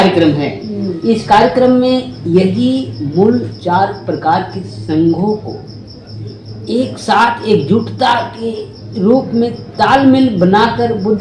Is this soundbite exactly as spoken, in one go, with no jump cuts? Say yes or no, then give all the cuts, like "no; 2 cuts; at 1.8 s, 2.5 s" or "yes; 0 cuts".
yes; 0 cuts